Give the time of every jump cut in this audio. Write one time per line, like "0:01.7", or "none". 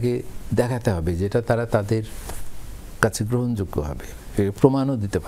none